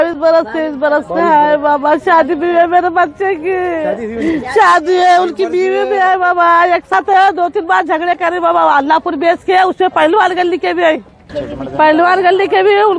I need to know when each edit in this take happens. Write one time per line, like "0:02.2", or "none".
0:06.9
0:11.4